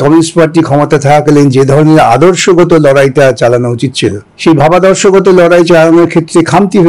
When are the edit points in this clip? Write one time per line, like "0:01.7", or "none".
0:04.3